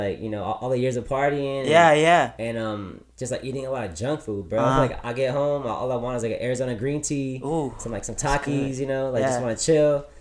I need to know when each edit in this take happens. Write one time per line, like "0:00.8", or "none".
none